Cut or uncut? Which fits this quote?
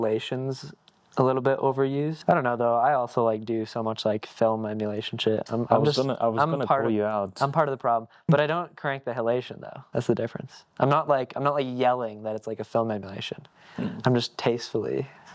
cut